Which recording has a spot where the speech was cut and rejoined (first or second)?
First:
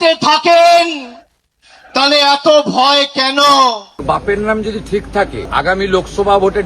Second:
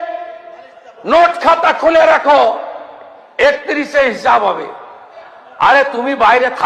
first